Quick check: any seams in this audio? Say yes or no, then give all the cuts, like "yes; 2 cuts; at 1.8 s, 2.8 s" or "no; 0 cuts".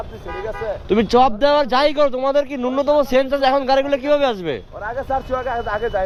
no; 0 cuts